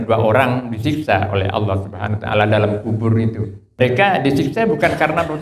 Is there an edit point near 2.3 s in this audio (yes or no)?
no